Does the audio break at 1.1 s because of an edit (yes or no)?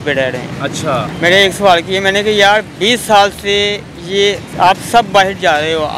yes